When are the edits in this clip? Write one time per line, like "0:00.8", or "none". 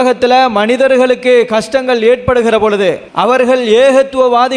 0:03.1

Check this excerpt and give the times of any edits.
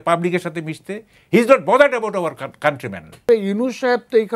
0:03.3

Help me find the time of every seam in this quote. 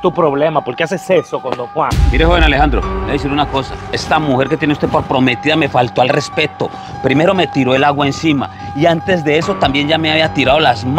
0:02.0

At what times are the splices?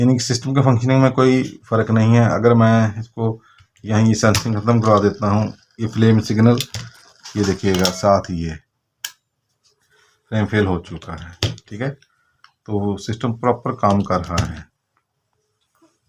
none

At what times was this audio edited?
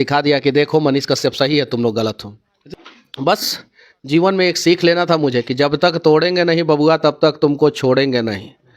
0:02.5

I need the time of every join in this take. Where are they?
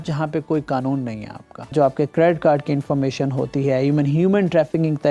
0:01.7

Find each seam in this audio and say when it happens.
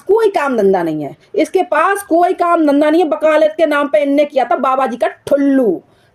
none

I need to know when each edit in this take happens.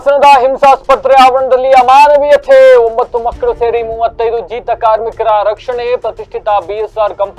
none

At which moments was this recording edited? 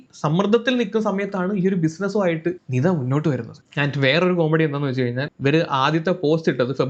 none

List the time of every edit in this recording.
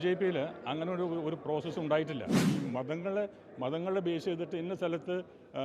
0:02.4

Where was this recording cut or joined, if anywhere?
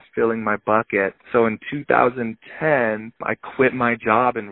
0:01.2
0:03.2

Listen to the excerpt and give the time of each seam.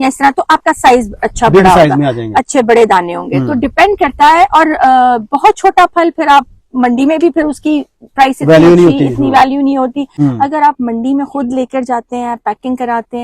0:10.1

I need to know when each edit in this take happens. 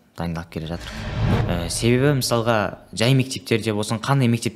0:01.3

